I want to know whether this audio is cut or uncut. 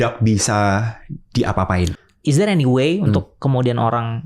cut